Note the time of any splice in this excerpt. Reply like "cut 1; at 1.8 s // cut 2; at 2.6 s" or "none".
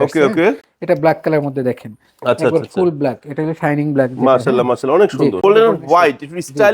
cut 1; at 5.4 s